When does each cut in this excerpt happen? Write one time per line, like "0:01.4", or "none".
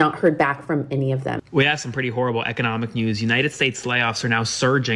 0:01.4